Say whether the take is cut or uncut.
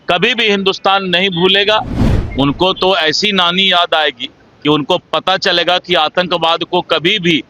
cut